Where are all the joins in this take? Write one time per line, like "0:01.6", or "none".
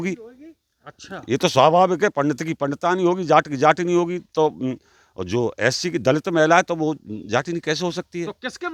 none